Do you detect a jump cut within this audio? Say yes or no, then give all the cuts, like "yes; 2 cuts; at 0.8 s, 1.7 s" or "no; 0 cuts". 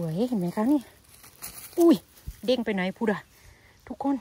no; 0 cuts